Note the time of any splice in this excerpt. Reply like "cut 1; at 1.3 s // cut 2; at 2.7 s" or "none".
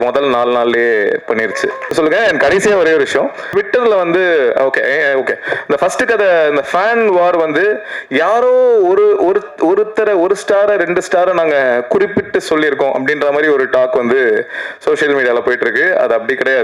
cut 1; at 1.9 s // cut 2; at 3.4 s